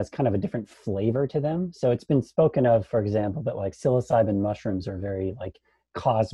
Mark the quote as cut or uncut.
uncut